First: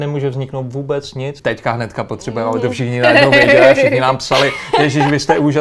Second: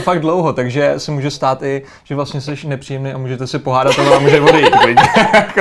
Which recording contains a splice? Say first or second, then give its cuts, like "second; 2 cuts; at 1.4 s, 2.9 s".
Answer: first; 1 cut; at 1.4 s